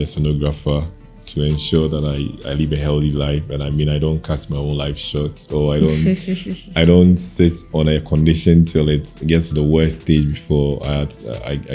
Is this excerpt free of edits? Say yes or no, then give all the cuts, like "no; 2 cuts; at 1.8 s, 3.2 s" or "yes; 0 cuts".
yes; 0 cuts